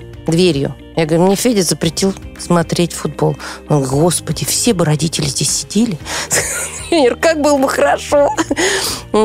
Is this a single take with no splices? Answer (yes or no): yes